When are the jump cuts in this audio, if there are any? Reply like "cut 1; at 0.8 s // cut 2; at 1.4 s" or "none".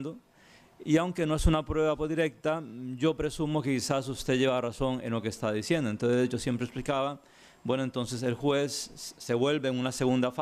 none